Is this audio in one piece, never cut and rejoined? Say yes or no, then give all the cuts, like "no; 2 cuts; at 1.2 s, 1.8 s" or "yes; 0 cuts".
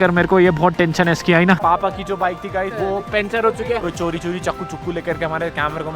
no; 2 cuts; at 1.6 s, 3.8 s